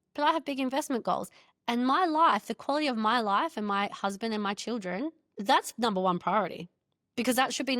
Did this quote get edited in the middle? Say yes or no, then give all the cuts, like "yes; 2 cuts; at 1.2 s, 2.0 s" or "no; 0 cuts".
yes; 1 cut; at 5.2 s